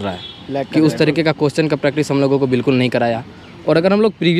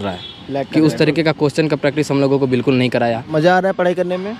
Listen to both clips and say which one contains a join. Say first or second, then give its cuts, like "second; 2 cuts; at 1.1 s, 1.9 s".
second; 1 cut; at 3.3 s